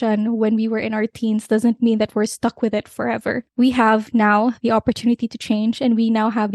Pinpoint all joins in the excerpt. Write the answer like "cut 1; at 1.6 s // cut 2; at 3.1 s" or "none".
cut 1; at 3.5 s